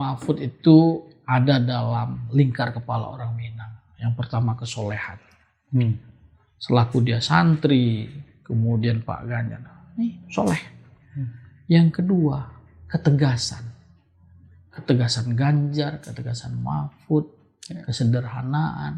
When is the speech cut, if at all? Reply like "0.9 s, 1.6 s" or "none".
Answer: none